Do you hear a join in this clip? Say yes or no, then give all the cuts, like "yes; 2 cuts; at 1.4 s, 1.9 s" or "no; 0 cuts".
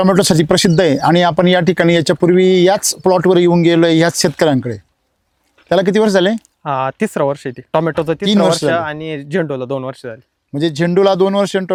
no; 0 cuts